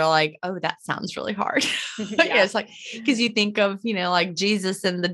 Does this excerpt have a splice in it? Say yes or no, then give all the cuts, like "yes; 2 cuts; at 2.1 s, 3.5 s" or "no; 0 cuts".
no; 0 cuts